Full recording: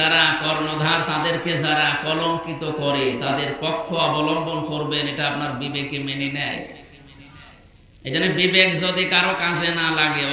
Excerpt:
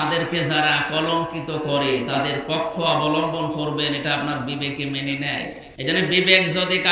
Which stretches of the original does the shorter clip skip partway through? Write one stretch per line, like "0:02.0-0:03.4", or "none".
0:06.8-0:07.9